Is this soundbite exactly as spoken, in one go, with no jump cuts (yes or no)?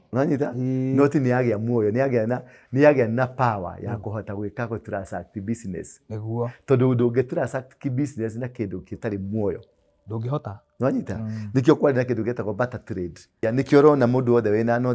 no